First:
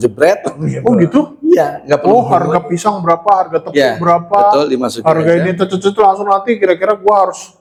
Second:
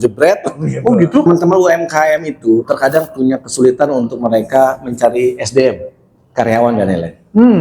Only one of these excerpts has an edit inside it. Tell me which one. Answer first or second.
second